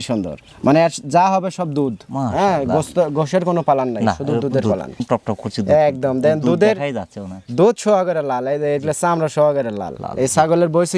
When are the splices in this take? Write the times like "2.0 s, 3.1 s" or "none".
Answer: none